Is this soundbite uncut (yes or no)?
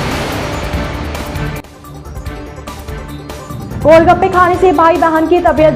no